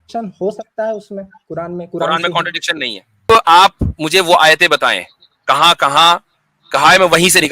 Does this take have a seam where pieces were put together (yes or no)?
yes